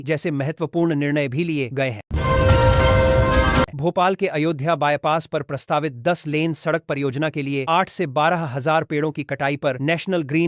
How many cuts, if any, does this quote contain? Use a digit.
2